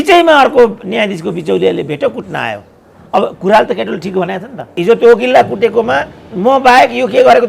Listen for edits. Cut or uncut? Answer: cut